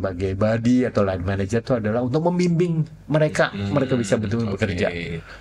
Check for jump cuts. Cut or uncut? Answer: uncut